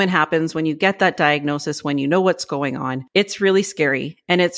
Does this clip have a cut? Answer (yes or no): yes